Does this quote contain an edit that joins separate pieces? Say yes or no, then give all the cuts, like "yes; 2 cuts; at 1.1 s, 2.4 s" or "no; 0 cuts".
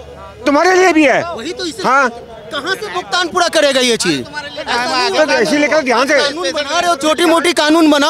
no; 0 cuts